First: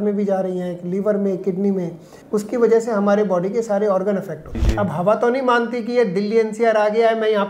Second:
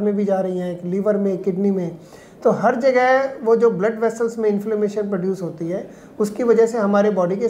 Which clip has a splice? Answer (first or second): first